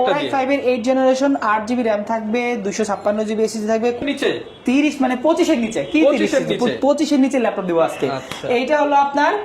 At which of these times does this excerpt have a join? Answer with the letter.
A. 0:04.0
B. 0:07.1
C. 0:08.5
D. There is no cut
A